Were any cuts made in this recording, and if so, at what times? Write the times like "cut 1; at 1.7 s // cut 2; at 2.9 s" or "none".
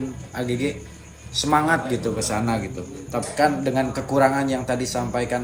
none